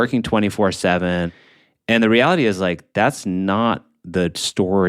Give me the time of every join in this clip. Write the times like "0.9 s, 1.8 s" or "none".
1.3 s